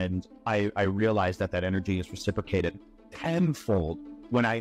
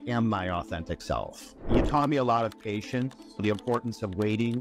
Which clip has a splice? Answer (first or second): second